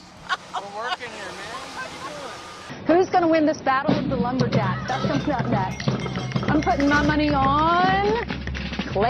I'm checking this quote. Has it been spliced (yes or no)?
yes